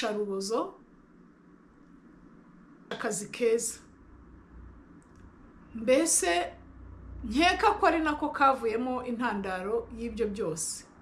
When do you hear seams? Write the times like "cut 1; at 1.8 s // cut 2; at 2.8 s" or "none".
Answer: cut 1; at 2.9 s

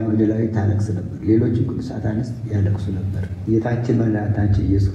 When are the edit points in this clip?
cut 1; at 3.3 s

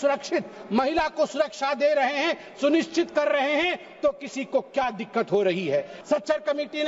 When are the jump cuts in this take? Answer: cut 1; at 5.9 s

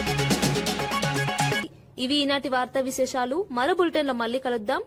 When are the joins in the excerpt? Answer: none

